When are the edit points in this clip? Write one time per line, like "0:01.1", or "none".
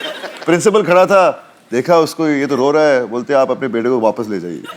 none